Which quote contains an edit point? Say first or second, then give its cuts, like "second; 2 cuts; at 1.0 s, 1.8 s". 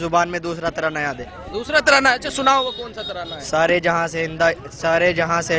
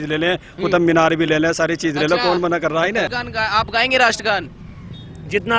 second; 1 cut; at 3.2 s